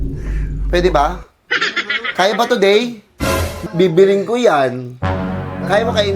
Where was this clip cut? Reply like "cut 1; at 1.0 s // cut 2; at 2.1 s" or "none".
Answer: cut 1; at 3.5 s